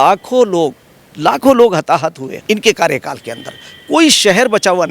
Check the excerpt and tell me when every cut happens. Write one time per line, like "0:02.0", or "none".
0:02.3